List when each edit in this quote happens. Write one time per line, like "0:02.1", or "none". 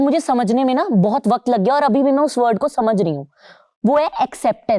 none